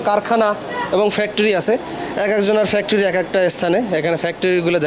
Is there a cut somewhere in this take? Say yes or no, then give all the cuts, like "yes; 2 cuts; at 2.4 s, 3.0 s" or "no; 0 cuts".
no; 0 cuts